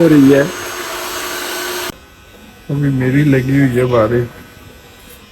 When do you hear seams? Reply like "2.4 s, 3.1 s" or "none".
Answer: 1.9 s

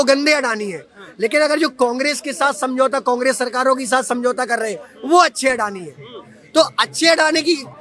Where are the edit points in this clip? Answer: none

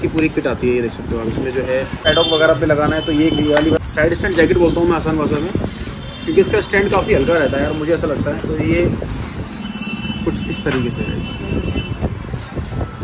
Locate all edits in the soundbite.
none

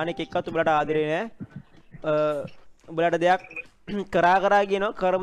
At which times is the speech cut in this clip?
none

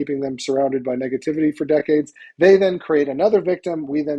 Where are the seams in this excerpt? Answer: none

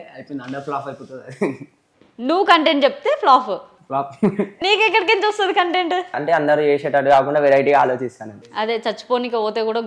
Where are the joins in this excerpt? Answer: 6.2 s, 8.4 s

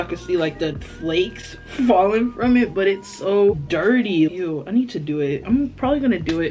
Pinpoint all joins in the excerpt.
none

